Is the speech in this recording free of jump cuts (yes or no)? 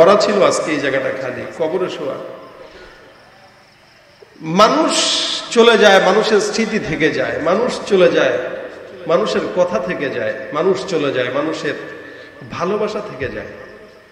yes